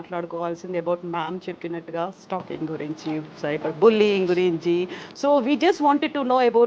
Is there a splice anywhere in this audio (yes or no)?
no